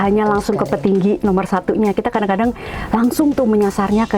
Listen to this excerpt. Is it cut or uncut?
uncut